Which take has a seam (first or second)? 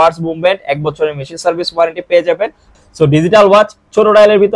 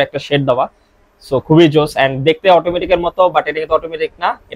first